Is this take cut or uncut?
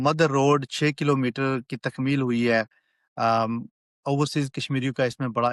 uncut